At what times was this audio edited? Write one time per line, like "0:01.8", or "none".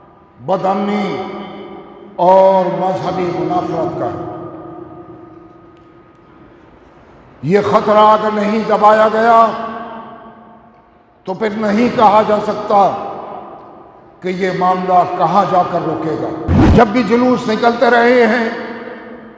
0:16.5